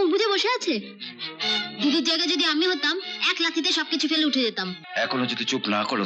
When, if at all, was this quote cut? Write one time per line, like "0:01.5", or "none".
0:04.7